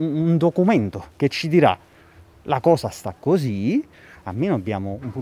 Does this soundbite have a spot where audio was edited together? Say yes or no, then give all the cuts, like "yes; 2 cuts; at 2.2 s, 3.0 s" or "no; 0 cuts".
no; 0 cuts